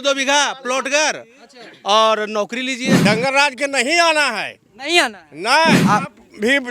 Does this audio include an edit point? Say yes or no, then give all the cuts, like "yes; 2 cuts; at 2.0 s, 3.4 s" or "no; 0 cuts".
yes; 2 cuts; at 3.0 s, 5.8 s